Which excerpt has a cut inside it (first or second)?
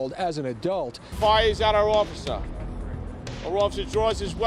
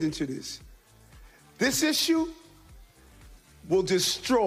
first